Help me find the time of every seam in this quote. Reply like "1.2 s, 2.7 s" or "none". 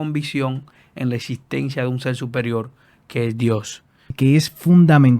4.1 s

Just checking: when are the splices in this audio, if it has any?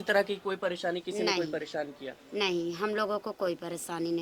none

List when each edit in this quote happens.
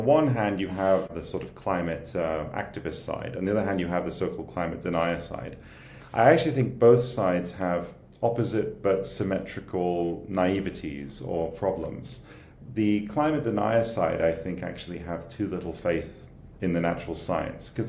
1.2 s

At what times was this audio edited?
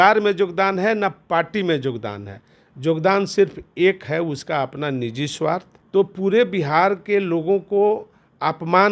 5.7 s

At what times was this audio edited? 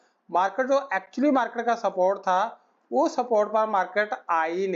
none

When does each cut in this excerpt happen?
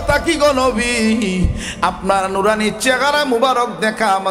none

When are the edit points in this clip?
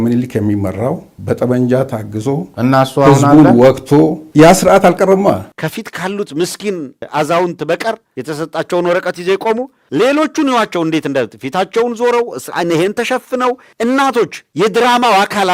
none

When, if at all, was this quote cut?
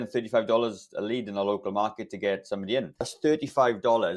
3.0 s

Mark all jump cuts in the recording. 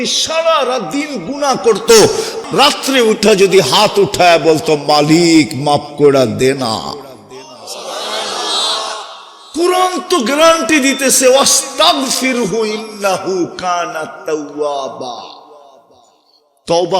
2.4 s

